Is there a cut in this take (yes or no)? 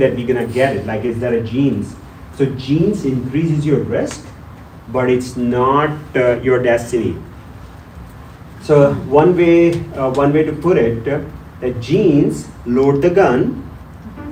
no